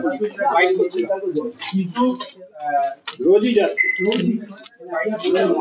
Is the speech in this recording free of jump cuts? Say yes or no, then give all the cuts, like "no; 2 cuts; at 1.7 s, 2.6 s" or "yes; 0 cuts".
yes; 0 cuts